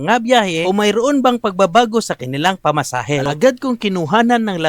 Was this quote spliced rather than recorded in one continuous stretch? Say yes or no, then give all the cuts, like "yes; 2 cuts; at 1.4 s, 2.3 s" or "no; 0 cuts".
yes; 1 cut; at 3.3 s